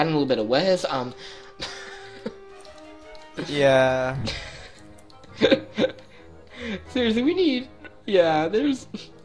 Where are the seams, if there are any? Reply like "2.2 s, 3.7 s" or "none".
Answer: 5.6 s